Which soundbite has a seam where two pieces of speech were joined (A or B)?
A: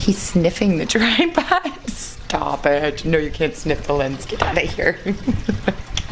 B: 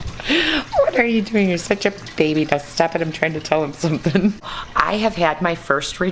B